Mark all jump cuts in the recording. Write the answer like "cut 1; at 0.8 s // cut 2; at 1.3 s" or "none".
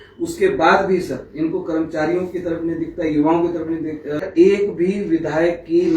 cut 1; at 4.2 s